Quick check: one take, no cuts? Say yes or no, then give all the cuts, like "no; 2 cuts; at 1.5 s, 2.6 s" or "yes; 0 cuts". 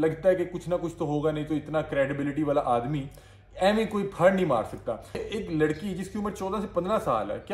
no; 1 cut; at 5.3 s